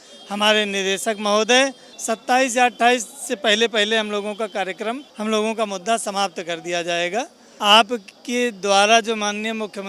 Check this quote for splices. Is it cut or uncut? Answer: cut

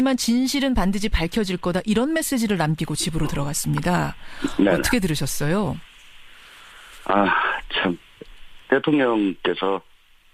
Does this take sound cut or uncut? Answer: uncut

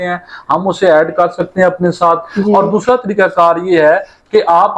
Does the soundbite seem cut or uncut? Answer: uncut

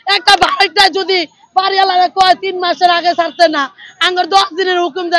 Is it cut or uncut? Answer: uncut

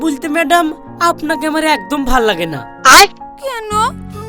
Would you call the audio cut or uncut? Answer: uncut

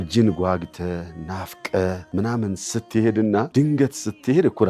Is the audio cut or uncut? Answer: cut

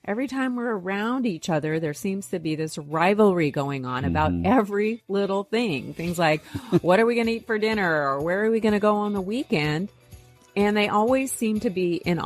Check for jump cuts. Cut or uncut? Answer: uncut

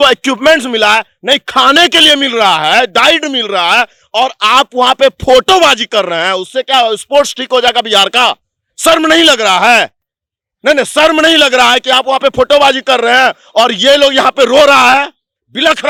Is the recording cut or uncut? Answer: uncut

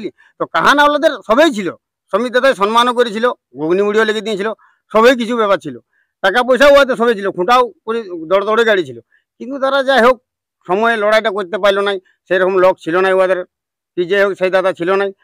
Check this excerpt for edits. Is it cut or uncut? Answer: uncut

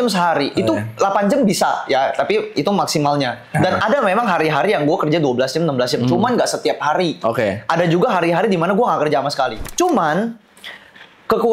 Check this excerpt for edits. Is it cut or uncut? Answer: cut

